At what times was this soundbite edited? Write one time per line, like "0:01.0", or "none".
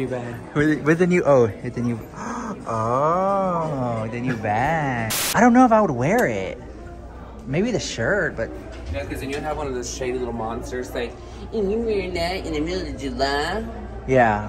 0:05.2